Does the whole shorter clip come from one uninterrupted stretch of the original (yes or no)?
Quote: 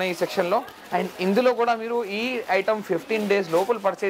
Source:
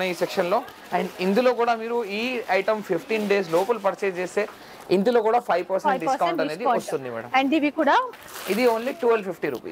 yes